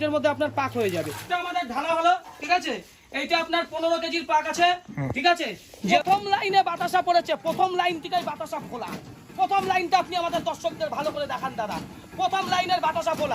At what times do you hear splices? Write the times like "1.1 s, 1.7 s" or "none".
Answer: 1.2 s, 5.7 s